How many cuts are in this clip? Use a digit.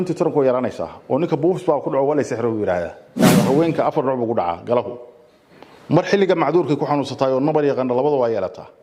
1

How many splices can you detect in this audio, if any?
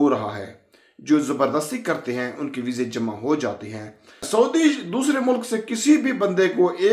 1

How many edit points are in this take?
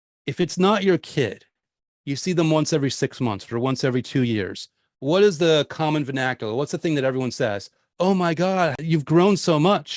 1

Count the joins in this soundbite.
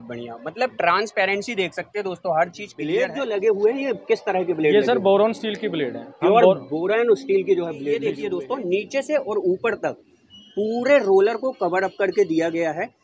2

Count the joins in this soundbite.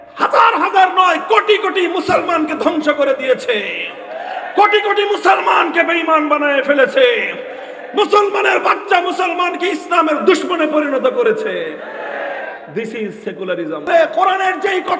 1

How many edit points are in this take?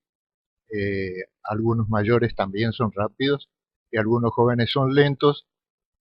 1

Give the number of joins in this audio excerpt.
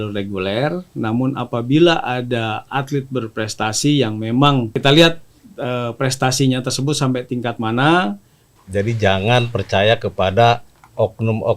2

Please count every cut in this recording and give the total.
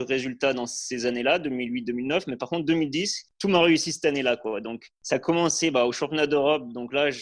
1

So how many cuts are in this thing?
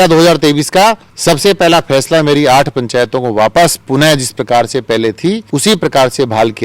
2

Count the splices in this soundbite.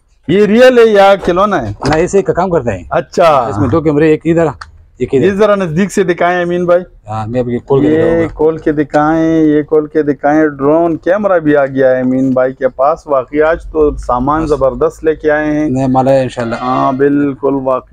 0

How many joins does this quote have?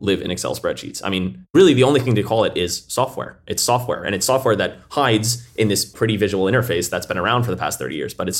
2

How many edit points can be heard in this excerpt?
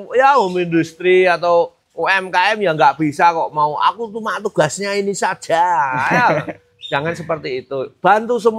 0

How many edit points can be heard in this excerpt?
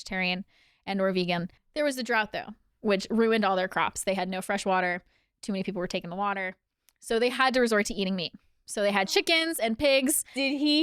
1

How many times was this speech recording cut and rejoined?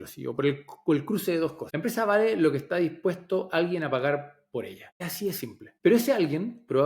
2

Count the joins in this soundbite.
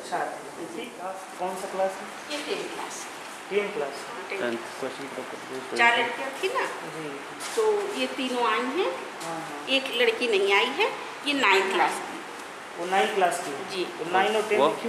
1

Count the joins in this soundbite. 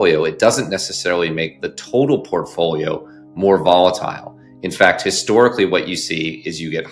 0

